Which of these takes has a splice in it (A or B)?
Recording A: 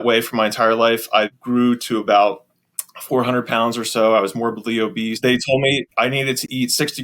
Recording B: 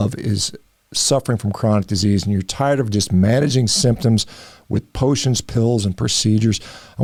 A